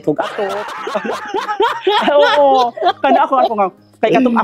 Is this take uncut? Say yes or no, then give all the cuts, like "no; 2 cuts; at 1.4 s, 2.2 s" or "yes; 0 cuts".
yes; 0 cuts